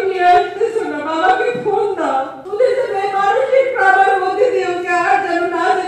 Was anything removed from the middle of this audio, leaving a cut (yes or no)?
yes